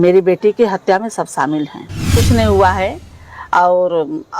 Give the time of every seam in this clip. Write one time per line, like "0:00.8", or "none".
0:02.1